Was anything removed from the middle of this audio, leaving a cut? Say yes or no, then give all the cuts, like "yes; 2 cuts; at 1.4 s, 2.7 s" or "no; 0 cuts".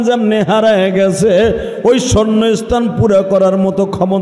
no; 0 cuts